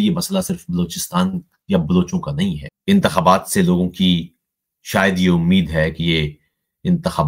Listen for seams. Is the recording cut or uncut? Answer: cut